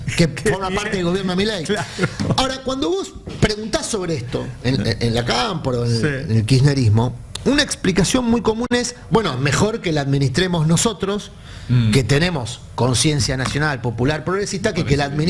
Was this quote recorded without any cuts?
yes; 0 cuts

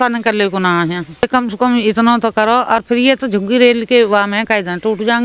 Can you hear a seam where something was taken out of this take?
yes; 1 cut; at 1.2 s

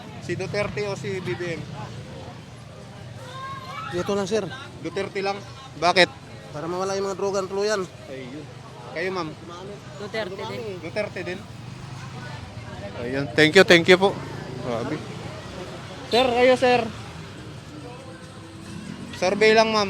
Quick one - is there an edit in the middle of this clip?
no; 0 cuts

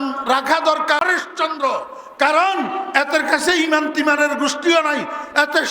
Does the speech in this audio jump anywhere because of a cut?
yes; 1 cut; at 1.0 s

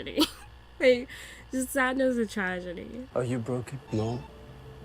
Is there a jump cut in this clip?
yes; 1 cut; at 3.1 s

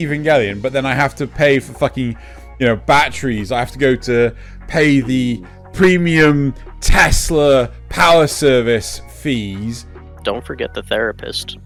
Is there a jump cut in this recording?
no; 0 cuts

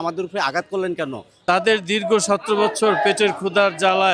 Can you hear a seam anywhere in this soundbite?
yes; 1 cut; at 1.4 s

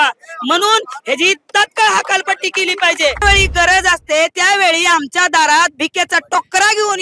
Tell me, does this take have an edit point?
yes; 1 cut; at 3.2 s

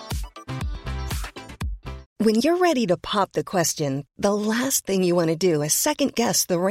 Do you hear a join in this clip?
yes; 1 cut; at 2.0 s

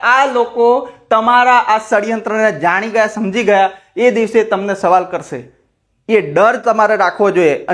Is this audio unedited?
yes; 0 cuts

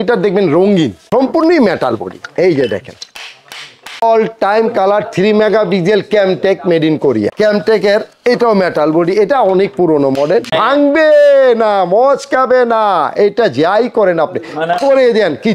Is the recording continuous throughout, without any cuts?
no; 4 cuts; at 1.0 s, 4.0 s, 7.3 s, 10.5 s

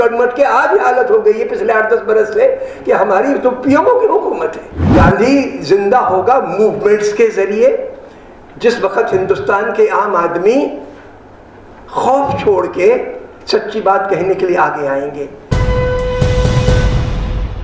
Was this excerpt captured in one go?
no; 2 cuts; at 4.8 s, 15.6 s

